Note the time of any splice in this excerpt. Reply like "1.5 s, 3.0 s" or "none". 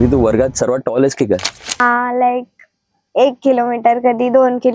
1.8 s